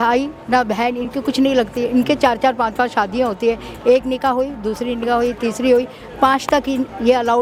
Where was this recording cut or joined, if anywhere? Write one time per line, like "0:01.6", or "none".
none